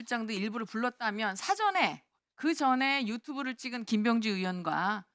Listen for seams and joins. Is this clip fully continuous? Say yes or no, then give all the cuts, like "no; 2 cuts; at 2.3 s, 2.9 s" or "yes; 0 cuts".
yes; 0 cuts